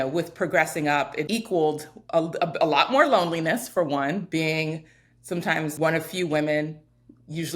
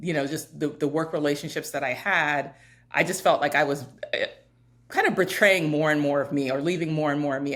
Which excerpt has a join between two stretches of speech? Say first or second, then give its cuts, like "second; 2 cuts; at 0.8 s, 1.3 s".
first; 2 cuts; at 1.3 s, 5.7 s